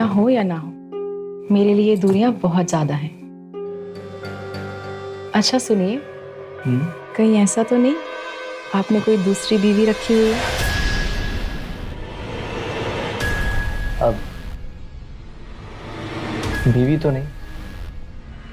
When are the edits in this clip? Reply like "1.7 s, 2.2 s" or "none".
none